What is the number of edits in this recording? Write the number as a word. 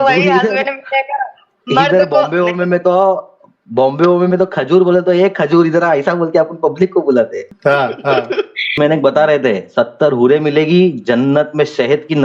two